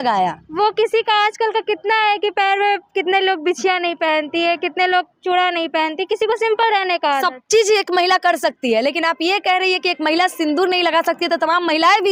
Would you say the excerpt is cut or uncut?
uncut